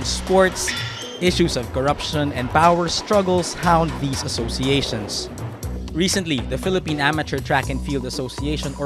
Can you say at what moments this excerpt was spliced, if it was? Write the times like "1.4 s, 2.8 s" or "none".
3.8 s